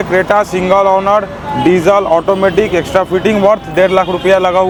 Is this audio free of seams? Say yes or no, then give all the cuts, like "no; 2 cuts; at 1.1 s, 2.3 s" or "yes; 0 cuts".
yes; 0 cuts